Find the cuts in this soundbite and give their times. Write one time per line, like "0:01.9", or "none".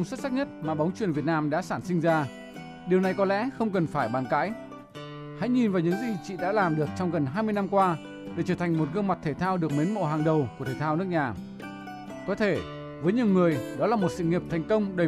0:07.3